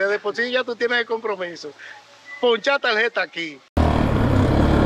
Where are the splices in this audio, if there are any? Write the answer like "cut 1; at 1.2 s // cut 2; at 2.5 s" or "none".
cut 1; at 3.8 s

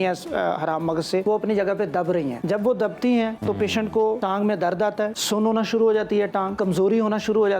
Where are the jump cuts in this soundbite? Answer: cut 1; at 1.2 s // cut 2; at 2.4 s // cut 3; at 3.8 s // cut 4; at 5.2 s // cut 5; at 6.5 s

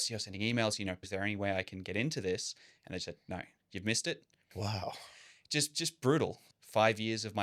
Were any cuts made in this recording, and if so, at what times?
cut 1; at 1.0 s // cut 2; at 4.4 s // cut 3; at 6.4 s

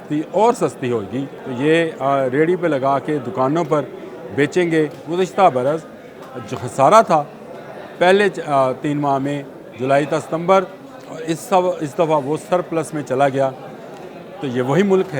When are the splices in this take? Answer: cut 1; at 1.4 s // cut 2; at 5.0 s

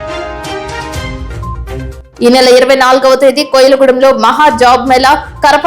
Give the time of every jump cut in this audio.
cut 1; at 1.1 s

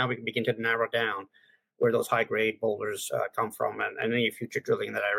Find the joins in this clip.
none

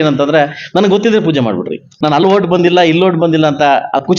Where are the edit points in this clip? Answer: cut 1; at 1.8 s

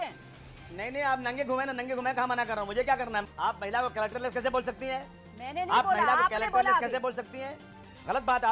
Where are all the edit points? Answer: cut 1; at 3.2 s

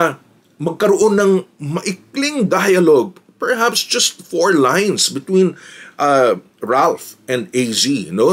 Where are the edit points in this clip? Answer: none

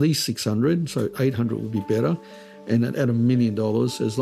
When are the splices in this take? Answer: none

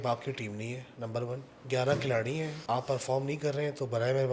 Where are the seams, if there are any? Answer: cut 1; at 1.5 s // cut 2; at 2.6 s

